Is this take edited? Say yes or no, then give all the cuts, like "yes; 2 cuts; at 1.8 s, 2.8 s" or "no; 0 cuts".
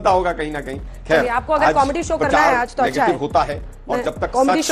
no; 0 cuts